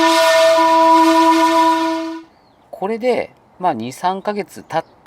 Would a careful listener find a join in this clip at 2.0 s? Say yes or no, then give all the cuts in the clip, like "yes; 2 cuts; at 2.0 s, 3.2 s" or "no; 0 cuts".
yes; 1 cut; at 2.0 s